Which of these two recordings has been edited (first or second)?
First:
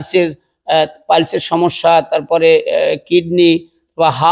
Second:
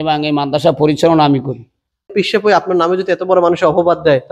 second